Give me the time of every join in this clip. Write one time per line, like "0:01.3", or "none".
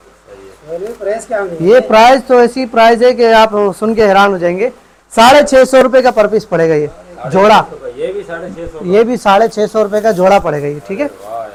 none